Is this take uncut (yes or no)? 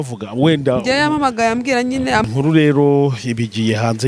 no